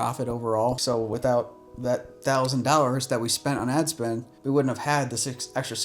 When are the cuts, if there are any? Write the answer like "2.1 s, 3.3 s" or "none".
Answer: 0.8 s, 4.3 s

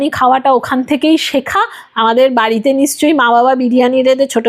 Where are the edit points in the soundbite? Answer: none

